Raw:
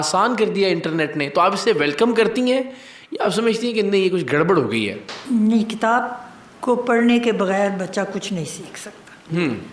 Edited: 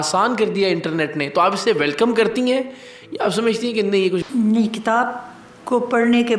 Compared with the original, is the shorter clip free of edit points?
no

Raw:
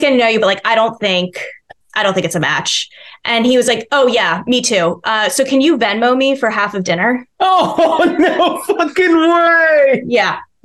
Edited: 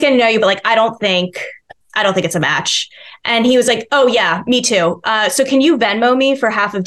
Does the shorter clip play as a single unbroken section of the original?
yes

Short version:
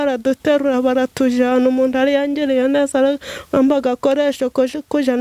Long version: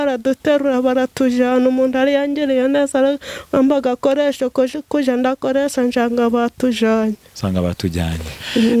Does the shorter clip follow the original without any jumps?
yes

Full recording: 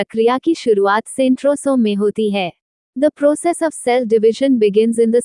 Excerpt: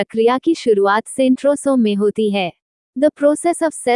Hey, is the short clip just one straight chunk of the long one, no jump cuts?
yes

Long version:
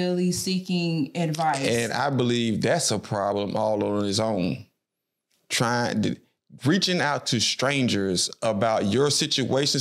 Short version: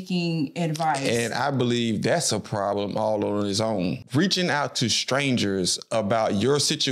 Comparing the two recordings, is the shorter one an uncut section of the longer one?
no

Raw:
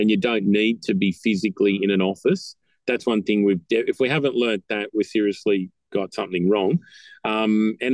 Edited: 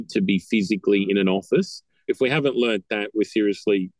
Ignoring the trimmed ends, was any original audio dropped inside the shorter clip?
yes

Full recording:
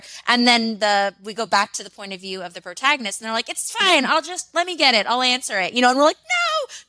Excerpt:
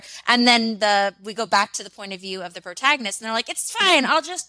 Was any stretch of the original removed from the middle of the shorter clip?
no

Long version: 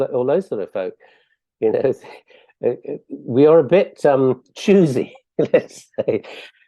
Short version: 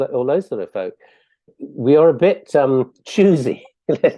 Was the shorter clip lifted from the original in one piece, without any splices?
no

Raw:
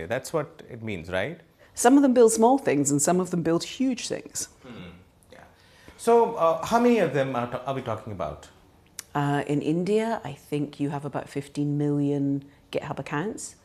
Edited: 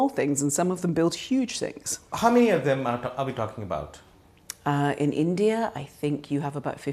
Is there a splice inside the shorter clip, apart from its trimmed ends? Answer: yes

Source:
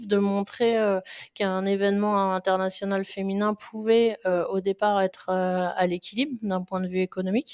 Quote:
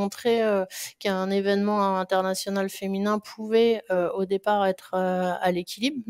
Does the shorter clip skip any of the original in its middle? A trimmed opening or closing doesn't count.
no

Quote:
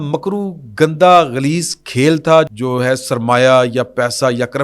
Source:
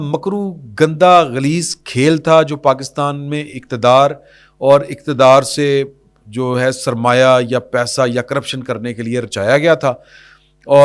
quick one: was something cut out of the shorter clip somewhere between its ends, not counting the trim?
yes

